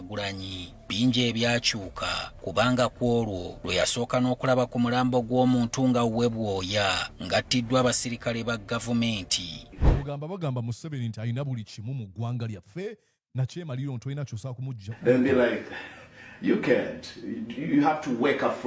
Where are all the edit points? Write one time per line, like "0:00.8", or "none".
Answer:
0:09.7